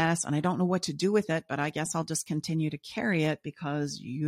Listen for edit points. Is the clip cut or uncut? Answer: uncut